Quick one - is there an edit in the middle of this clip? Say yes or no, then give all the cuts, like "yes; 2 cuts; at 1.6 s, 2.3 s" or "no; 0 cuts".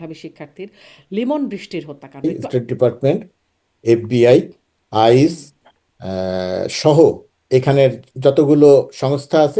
yes; 1 cut; at 2.2 s